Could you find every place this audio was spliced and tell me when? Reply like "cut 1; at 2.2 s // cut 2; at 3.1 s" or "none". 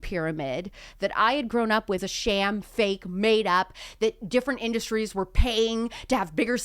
cut 1; at 2.0 s